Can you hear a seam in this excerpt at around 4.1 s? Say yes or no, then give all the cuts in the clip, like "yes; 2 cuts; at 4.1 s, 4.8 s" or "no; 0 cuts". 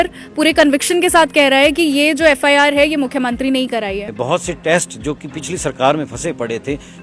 yes; 1 cut; at 4.1 s